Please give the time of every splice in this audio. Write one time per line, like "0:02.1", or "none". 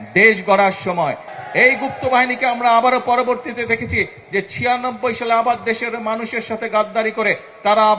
0:01.3